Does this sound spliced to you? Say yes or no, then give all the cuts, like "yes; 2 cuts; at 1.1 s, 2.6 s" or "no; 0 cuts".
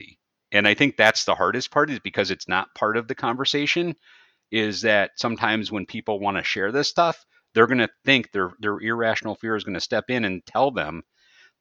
no; 0 cuts